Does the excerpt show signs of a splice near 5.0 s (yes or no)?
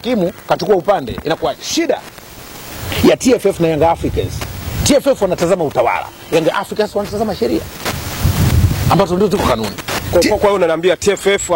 no